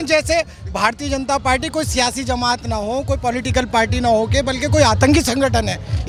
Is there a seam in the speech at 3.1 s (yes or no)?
no